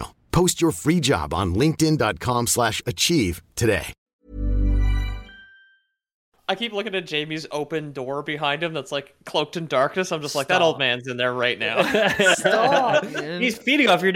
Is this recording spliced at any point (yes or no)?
yes